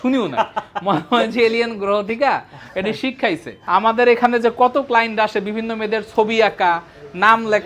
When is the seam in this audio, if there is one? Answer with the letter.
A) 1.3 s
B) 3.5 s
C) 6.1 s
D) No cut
B